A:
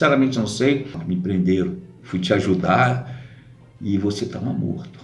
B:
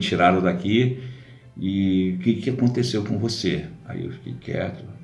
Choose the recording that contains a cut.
A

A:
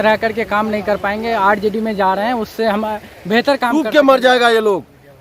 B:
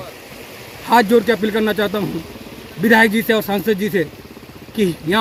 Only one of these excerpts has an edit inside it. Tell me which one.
A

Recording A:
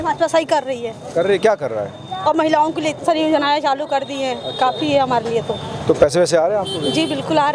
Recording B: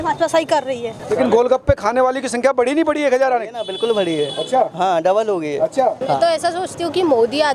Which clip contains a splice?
B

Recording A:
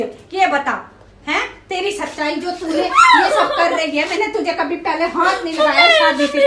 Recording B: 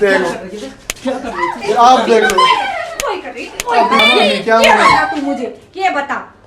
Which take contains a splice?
B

